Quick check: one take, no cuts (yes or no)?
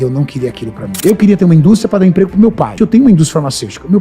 no